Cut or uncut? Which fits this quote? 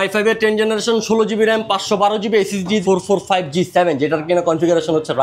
cut